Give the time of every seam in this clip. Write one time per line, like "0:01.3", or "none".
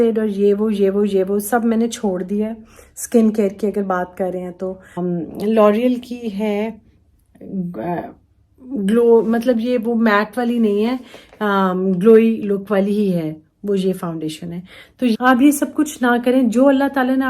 0:05.0
0:15.2

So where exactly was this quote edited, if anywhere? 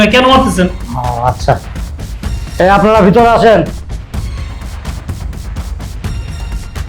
0:03.7

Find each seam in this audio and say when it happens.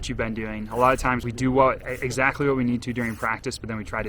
0:01.2

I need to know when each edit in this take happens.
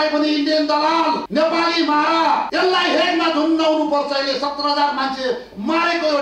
0:01.2
0:02.5

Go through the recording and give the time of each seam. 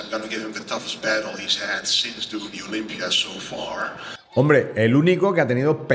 0:04.2

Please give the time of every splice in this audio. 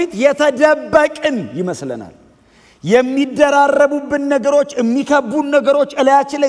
none

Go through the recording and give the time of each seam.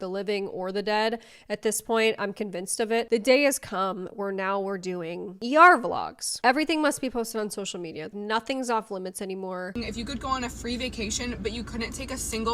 0:03.1
0:06.4
0:09.7

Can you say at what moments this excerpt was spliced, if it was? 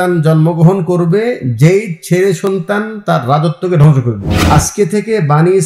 0:04.3

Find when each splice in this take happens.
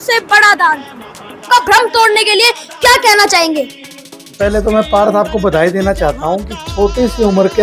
0:01.5

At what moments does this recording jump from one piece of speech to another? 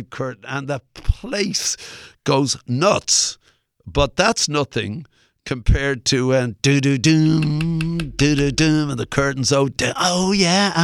none

